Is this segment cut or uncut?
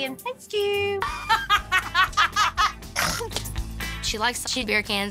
cut